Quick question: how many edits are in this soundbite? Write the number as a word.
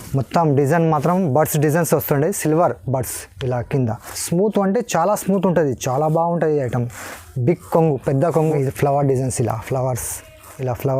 two